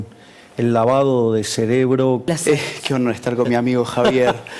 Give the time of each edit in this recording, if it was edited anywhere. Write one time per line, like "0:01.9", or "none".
0:02.3